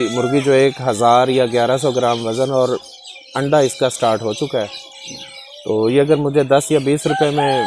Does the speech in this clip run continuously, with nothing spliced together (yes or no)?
yes